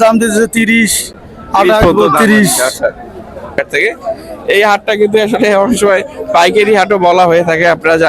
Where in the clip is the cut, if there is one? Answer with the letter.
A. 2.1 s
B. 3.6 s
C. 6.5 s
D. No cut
B